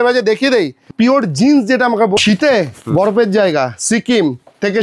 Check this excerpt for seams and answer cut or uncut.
cut